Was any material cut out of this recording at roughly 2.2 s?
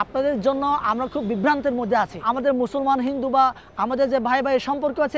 yes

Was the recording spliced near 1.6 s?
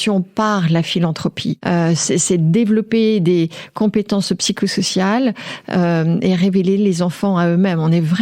no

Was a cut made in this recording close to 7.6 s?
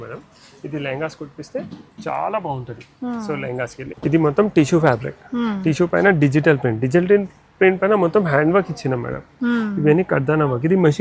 no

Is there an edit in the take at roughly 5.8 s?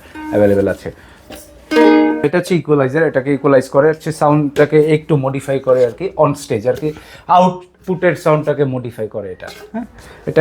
no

